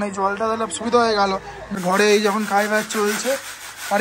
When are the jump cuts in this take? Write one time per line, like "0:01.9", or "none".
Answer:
0:01.6